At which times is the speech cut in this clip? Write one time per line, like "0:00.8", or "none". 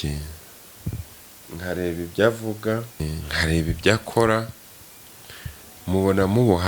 0:03.1